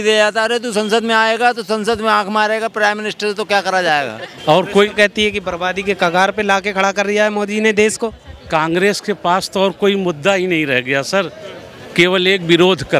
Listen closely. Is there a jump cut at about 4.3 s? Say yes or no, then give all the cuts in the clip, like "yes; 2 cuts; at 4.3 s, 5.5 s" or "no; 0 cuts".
yes; 1 cut; at 4.3 s